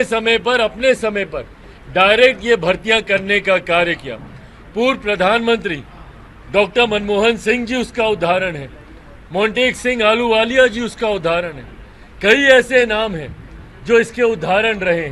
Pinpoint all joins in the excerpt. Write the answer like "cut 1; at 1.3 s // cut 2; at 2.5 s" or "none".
none